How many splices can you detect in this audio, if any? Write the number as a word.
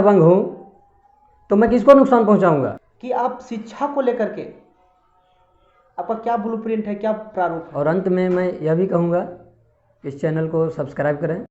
two